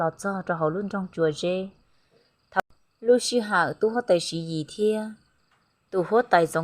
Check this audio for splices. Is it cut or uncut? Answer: cut